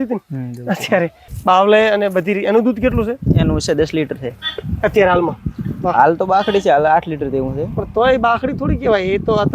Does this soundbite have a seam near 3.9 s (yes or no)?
no